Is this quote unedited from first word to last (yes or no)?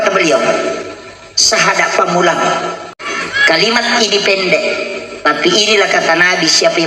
no